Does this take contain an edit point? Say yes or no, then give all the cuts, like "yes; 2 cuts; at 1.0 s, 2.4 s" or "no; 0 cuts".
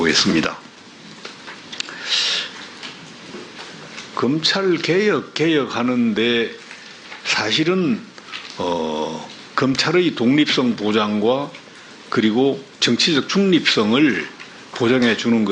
no; 0 cuts